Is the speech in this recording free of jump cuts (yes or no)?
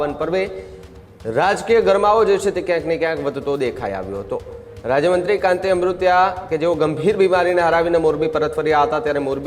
yes